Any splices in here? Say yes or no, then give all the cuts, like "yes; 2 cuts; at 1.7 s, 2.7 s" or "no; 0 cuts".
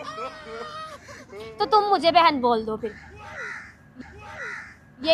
no; 0 cuts